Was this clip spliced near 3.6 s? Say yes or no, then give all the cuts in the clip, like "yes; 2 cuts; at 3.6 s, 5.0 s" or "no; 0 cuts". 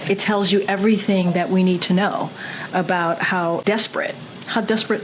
yes; 1 cut; at 3.6 s